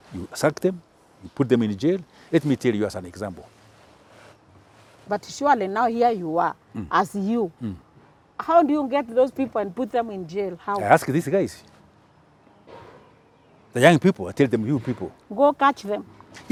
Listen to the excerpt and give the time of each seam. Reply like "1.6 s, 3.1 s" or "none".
none